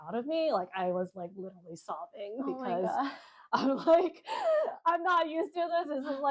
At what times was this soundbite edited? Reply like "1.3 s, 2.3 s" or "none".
none